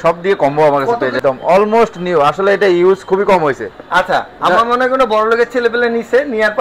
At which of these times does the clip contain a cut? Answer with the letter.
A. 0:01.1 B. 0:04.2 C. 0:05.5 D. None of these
A